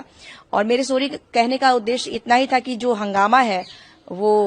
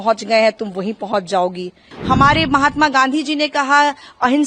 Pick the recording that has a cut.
second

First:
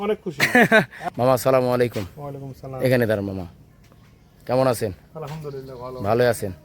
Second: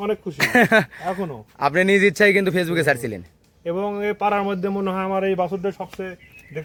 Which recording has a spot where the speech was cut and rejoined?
first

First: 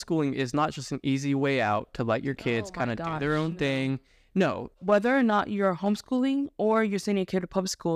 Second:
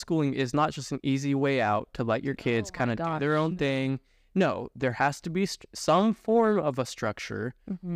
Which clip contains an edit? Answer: first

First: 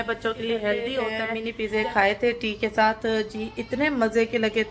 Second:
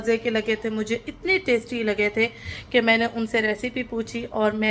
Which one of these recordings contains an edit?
first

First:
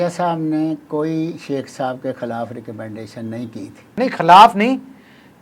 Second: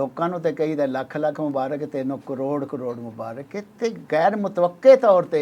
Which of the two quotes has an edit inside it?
first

